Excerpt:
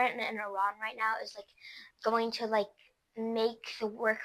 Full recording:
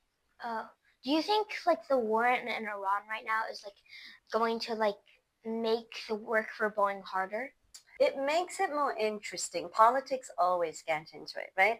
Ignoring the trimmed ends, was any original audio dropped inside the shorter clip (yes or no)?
no